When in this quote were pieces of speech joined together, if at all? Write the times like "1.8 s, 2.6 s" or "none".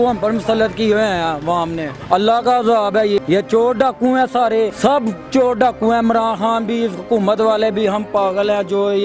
1.9 s, 3.2 s, 4.7 s